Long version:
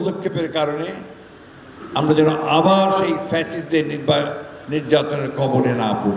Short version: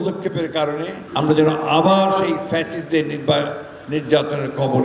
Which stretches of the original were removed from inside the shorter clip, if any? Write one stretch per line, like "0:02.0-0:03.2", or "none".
0:01.0-0:01.8